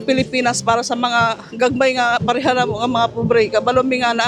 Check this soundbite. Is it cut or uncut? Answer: uncut